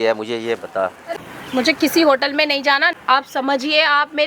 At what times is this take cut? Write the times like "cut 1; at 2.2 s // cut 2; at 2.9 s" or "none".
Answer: cut 1; at 1.0 s // cut 2; at 3.0 s